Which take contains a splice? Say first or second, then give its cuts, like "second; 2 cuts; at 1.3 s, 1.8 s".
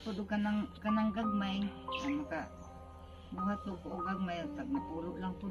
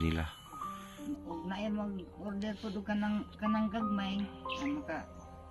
second; 1 cut; at 1.0 s